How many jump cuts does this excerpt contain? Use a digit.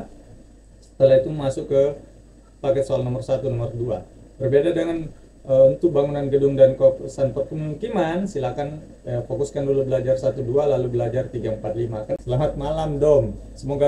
1